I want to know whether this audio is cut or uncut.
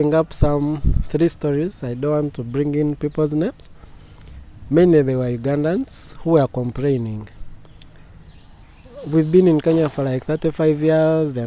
uncut